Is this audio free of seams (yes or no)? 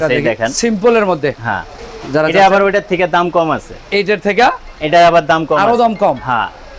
yes